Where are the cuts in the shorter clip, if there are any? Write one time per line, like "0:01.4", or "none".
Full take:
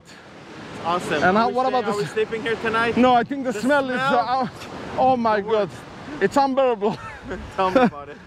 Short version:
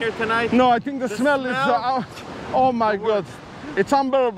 none